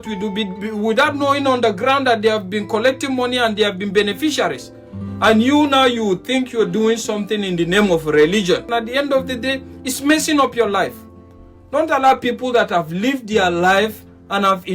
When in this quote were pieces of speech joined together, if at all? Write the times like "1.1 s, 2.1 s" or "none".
8.7 s